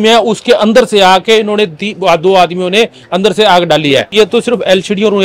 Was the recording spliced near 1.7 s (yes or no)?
no